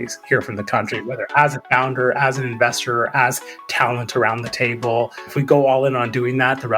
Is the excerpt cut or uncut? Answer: cut